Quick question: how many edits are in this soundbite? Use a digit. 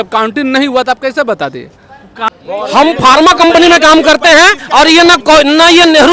1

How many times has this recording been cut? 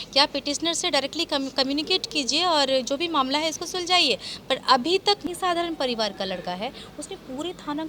1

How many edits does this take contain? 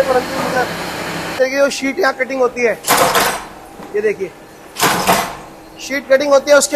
1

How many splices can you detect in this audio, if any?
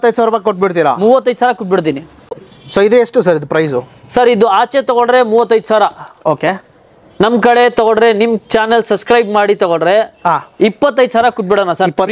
1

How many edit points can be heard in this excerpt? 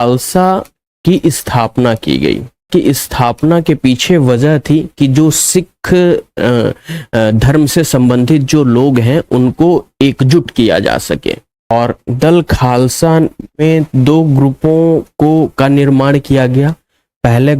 2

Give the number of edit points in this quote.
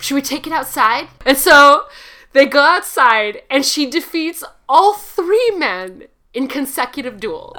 1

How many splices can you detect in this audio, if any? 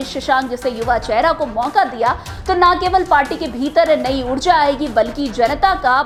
0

